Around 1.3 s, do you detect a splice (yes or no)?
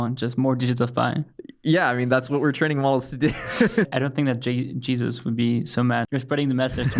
no